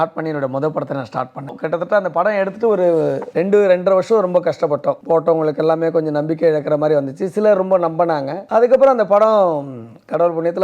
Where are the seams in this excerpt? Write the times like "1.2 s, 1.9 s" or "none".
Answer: 1.6 s, 3.2 s, 5.0 s, 8.4 s